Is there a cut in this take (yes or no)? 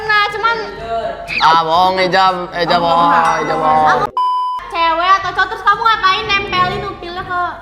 yes